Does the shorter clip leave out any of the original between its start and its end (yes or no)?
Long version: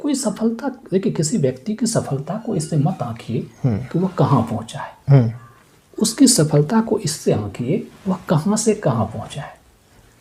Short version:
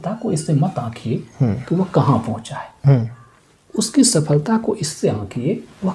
no